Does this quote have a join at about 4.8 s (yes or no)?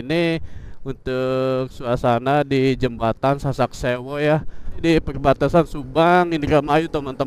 yes